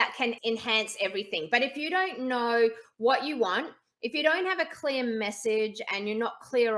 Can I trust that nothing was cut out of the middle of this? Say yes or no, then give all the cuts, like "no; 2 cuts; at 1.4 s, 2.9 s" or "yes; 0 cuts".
yes; 0 cuts